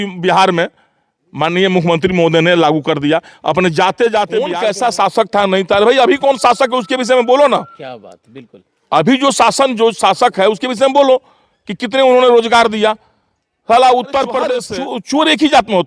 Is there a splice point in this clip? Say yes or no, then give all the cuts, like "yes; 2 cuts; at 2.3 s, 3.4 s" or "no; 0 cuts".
yes; 2 cuts; at 4.5 s, 14.6 s